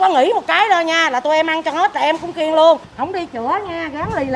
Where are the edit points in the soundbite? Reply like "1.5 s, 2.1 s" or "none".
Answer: 2.9 s